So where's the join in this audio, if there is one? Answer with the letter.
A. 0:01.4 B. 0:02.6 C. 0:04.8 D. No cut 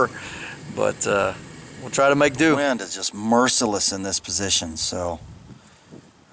B